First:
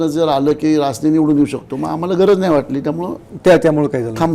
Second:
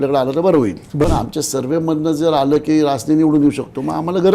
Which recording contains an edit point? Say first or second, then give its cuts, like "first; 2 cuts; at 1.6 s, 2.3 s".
second; 1 cut; at 1.0 s